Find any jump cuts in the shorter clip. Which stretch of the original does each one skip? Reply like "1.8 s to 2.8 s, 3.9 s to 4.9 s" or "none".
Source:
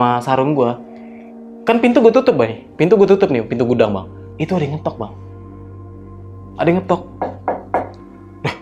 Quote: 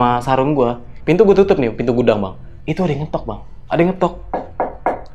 0.9 s to 2.6 s, 5.2 s to 6.4 s